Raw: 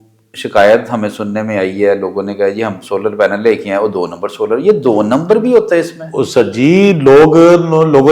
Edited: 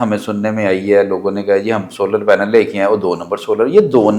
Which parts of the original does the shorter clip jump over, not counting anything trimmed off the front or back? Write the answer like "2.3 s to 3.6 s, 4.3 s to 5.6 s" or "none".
none

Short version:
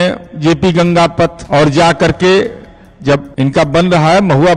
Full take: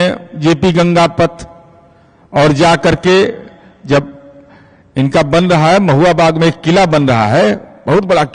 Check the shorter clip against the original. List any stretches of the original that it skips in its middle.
1.4 s to 2.2 s, 4.1 s to 4.9 s

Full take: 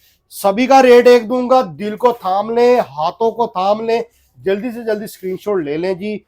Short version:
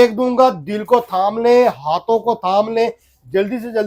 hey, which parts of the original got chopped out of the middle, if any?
none

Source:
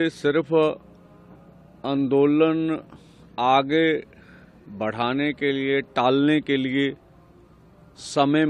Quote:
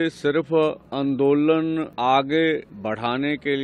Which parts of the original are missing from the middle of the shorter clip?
0.8 s to 1.8 s, 2.8 s to 3.3 s, 4.1 s to 4.7 s

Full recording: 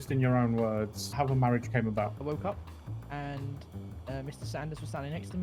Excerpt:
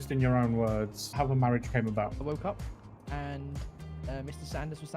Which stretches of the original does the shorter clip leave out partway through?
none

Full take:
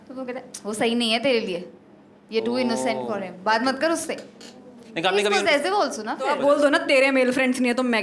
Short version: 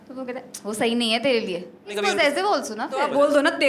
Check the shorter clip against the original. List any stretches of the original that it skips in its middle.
2.0 s to 5.2 s

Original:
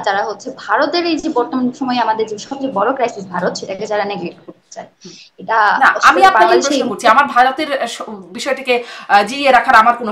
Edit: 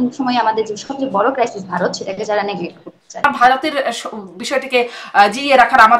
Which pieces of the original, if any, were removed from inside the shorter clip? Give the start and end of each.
4.9 s to 7.2 s

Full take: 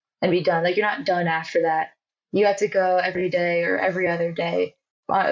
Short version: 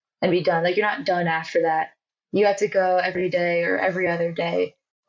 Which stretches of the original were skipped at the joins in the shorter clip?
none

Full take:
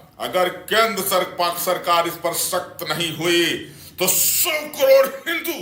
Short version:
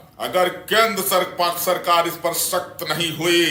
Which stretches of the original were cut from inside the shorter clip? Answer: none

